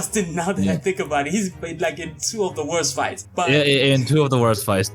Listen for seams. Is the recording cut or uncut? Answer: uncut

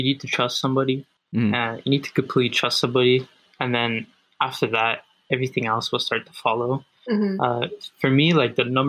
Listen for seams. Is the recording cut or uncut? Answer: cut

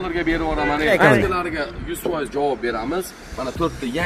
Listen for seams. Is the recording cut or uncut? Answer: cut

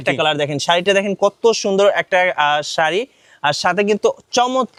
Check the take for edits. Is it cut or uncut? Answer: uncut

